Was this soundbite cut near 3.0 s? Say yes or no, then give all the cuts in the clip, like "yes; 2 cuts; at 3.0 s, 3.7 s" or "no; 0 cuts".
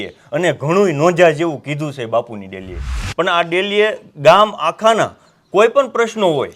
yes; 1 cut; at 3.0 s